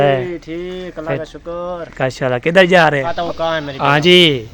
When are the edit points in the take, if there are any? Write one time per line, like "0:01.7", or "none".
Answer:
0:03.1